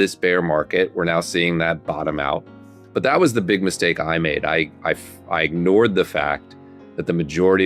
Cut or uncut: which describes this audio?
uncut